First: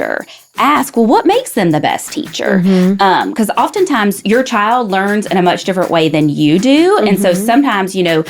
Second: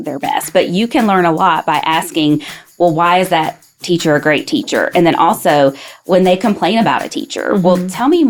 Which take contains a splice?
first; 1 cut; at 4.2 s

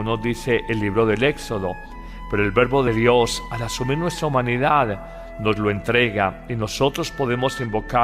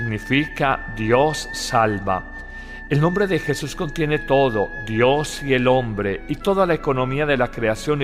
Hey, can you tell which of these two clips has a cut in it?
first; 1 cut; at 1.3 s

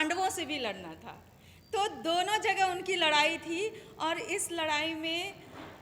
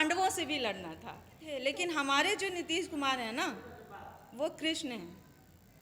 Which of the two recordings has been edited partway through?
second; 1 cut; at 1.4 s

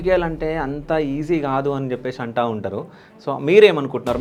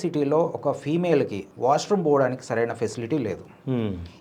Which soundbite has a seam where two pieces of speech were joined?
second; 1 cut; at 1.4 s

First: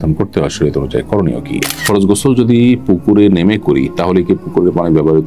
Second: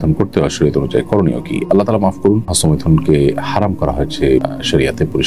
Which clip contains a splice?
first; 1 cut; at 1.6 s

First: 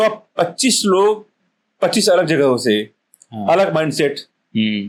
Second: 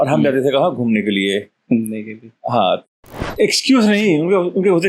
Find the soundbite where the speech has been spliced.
second; 1 cut; at 2.9 s

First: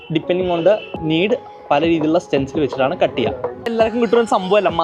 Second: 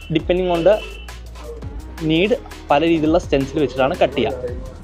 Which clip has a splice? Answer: first; 2 cuts; at 0.9 s, 3.7 s

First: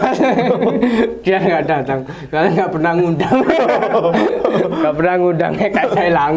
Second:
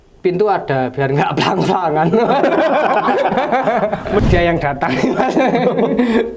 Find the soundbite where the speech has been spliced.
second; 1 cut; at 4.2 s

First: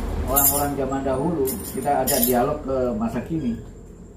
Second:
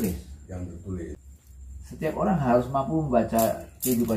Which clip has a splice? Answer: second; 1 cut; at 1.3 s

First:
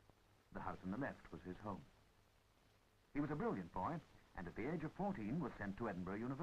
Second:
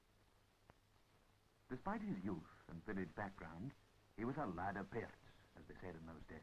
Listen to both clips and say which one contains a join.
first; 1 cut; at 5.3 s

